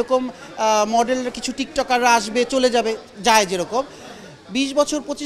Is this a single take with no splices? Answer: yes; 0 cuts

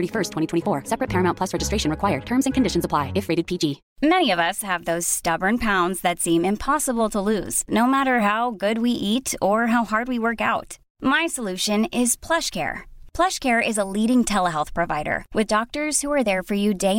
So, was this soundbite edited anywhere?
yes; 1 cut; at 3.8 s

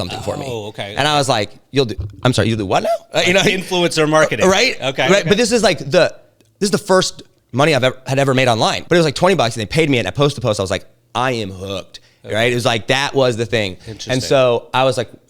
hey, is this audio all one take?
no; 1 cut; at 8.8 s

